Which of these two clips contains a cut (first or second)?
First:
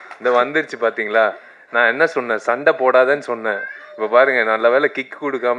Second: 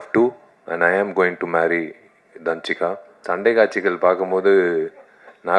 second